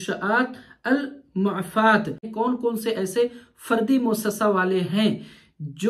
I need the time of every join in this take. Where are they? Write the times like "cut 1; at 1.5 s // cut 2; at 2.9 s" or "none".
cut 1; at 2.3 s